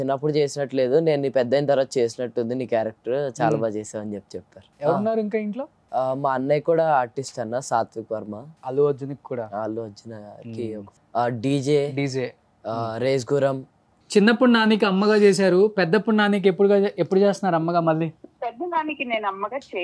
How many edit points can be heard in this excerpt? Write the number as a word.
five